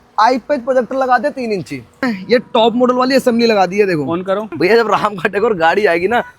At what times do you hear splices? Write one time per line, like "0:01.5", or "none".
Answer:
0:02.1
0:04.5